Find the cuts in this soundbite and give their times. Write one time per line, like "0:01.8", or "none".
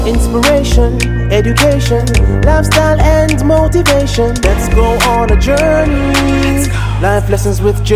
none